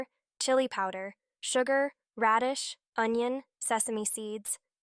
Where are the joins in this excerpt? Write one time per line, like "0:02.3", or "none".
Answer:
0:03.5